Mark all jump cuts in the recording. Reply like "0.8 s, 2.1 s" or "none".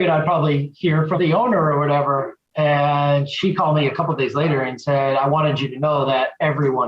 1.2 s, 2.4 s

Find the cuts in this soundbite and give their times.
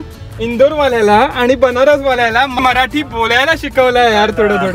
2.5 s

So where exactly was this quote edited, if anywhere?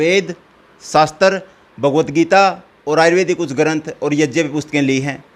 none

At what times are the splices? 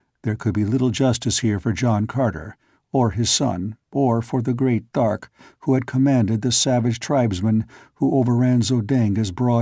none

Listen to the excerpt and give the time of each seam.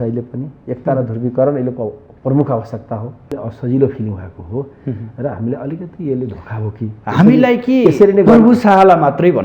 3.3 s

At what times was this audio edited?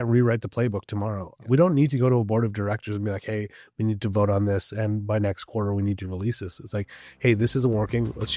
none

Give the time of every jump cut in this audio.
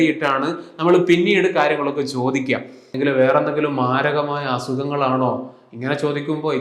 2.9 s

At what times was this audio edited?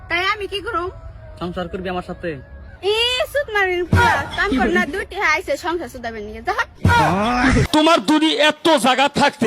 7.6 s

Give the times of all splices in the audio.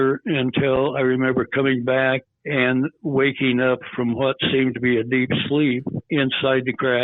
6.1 s

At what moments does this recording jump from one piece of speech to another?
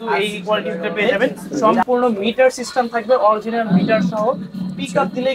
1.6 s

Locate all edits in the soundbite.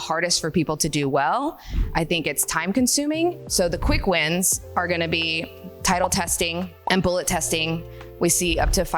3.5 s, 6.8 s

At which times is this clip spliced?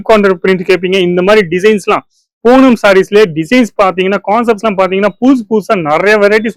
none

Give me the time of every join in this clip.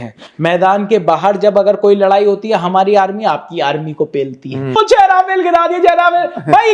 4.6 s

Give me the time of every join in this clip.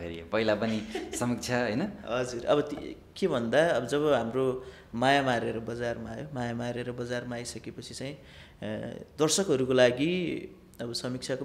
none

